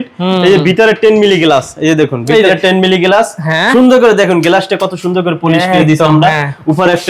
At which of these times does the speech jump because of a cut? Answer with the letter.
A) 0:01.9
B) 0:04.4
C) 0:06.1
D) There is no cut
D